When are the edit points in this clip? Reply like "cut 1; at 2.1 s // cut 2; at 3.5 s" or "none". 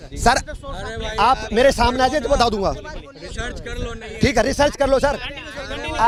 none

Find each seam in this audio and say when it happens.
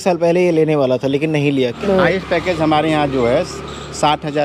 cut 1; at 1.8 s

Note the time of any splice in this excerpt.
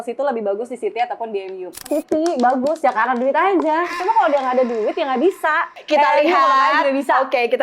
cut 1; at 1.9 s // cut 2; at 5.7 s

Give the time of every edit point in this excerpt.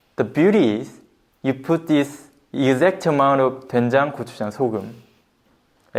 none

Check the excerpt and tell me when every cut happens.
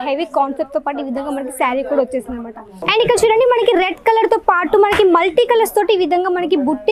cut 1; at 2.8 s

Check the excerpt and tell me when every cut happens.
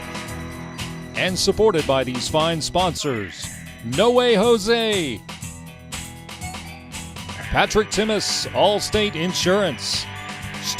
cut 1; at 1.1 s

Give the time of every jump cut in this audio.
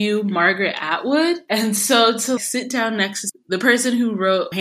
cut 1; at 1.4 s // cut 2; at 3.3 s

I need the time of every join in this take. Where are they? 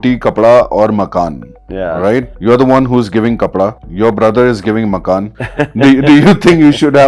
cut 1; at 2.3 s // cut 2; at 3.8 s // cut 3; at 5.4 s

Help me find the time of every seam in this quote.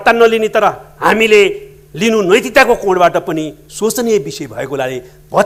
none

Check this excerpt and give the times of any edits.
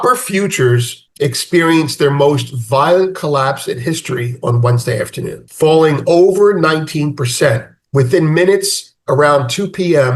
cut 1; at 1.0 s // cut 2; at 5.4 s

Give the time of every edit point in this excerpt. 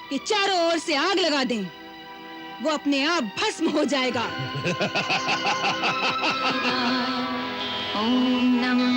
none

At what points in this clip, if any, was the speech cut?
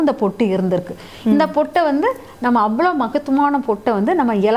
none

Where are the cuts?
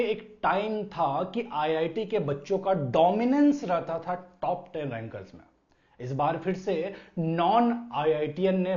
none

